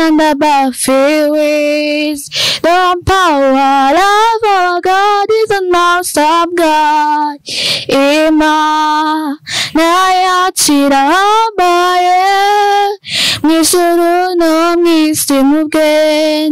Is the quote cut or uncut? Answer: uncut